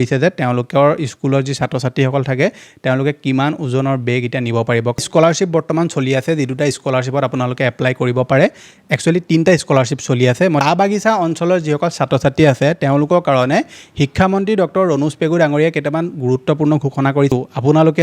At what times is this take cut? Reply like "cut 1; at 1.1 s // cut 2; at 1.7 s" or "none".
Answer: cut 1; at 5.0 s // cut 2; at 10.6 s // cut 3; at 17.3 s